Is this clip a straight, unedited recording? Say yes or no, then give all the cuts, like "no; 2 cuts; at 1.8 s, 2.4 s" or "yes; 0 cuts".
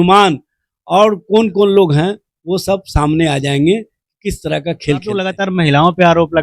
no; 1 cut; at 5.1 s